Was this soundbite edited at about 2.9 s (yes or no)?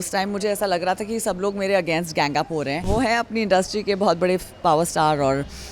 yes